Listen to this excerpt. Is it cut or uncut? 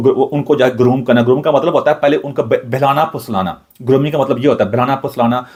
uncut